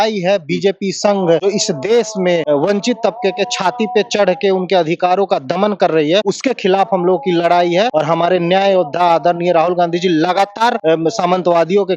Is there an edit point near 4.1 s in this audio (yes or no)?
no